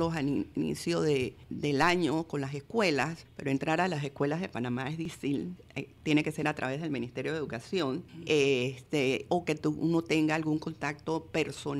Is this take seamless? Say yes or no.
no